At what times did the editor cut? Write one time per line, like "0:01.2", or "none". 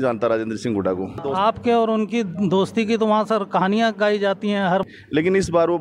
0:01.2
0:04.8